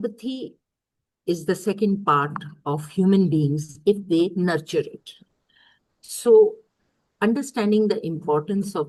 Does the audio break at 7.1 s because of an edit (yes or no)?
no